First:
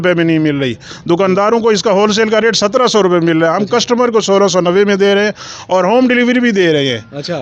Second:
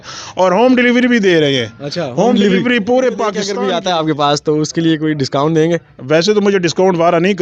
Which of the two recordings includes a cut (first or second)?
second